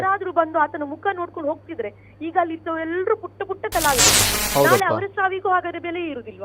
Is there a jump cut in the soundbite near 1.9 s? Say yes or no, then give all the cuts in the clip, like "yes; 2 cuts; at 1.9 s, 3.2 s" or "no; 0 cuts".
no; 1 cut; at 4.2 s